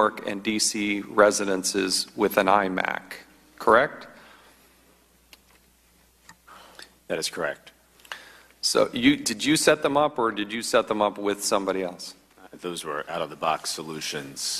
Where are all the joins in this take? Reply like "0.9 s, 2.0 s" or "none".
10.9 s